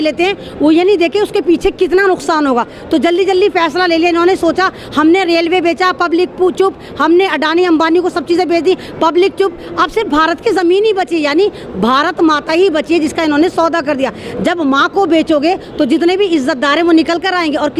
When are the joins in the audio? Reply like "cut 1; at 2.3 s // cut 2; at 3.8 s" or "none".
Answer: none